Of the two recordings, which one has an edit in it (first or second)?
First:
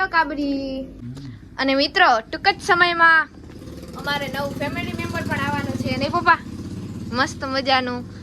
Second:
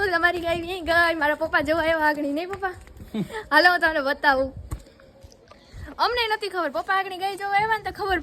first